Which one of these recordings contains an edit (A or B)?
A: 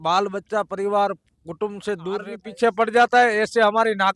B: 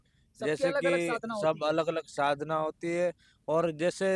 A